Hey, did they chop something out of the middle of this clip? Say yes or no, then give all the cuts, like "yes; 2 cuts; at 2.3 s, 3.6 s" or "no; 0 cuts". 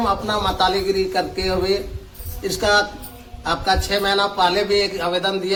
no; 0 cuts